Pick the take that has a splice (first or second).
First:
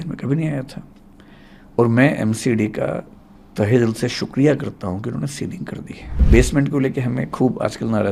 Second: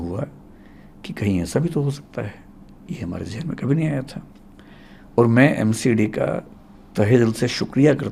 first